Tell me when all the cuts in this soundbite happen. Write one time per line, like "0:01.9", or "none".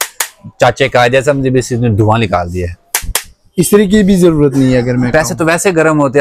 none